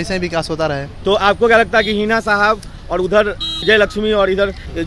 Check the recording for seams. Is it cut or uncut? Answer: uncut